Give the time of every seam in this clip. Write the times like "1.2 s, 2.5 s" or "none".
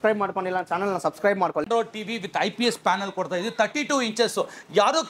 1.7 s